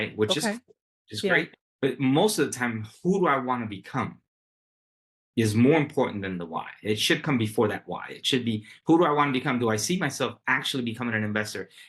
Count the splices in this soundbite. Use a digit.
1